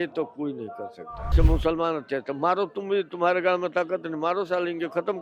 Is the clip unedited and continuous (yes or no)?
no